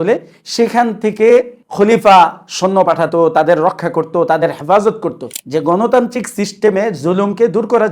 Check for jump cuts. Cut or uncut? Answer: cut